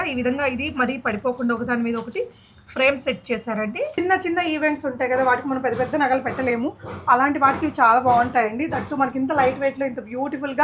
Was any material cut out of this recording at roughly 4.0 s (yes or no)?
yes